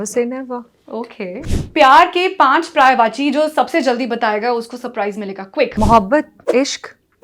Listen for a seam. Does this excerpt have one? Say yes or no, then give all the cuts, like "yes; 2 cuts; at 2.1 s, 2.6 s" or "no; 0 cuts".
yes; 2 cuts; at 1.4 s, 5.7 s